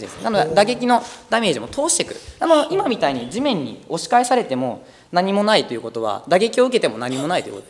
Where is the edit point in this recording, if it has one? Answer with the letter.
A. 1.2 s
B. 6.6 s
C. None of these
C